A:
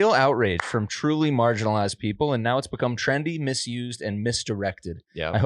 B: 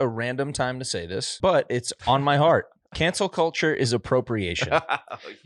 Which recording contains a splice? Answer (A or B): B